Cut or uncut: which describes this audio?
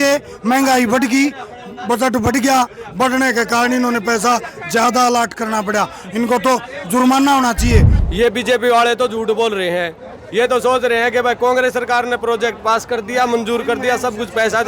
cut